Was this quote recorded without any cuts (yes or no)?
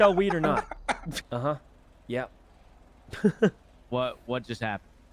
no